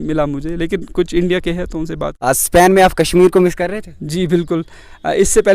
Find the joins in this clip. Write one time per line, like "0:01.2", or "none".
0:02.0